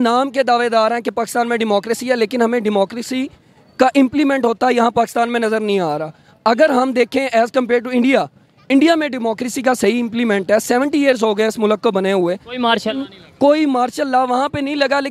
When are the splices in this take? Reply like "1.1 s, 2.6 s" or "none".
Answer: none